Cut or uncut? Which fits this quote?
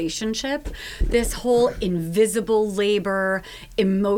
uncut